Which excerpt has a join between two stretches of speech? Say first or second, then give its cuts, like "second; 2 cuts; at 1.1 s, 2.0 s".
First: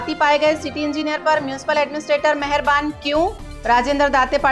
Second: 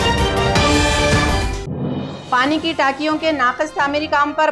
second; 1 cut; at 2.1 s